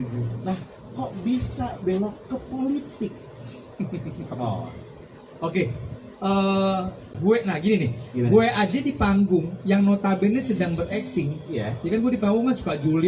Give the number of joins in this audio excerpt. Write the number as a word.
one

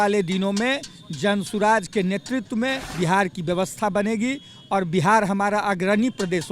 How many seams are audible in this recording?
one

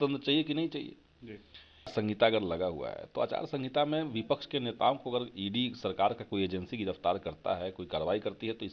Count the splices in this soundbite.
one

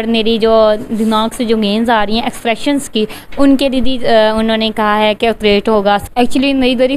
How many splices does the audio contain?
one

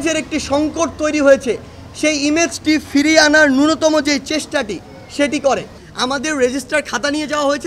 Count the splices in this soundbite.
one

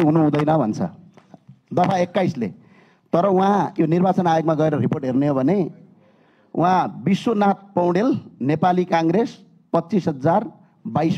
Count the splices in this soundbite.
zero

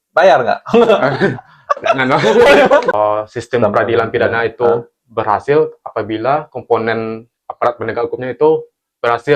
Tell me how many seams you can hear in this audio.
one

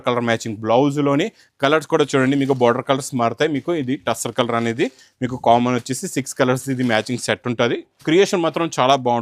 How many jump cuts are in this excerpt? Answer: zero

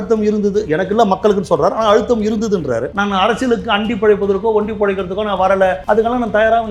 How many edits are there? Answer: two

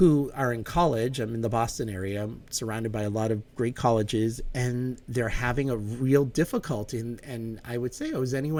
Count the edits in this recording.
zero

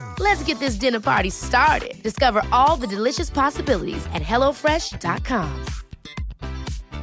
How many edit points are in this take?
zero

